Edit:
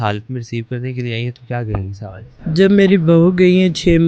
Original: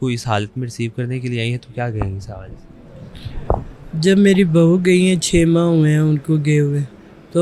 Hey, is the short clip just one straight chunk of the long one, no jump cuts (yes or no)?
no